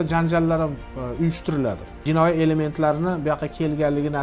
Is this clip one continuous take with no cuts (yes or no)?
no